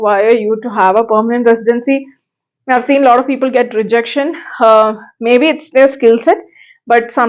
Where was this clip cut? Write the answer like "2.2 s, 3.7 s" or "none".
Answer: none